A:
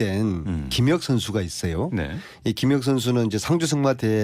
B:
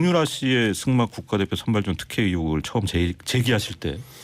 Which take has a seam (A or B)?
A